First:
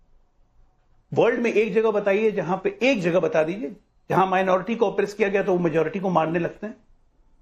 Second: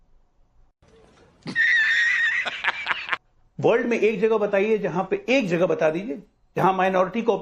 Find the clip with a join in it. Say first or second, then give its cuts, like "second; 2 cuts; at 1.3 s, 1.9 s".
first; 1 cut; at 0.9 s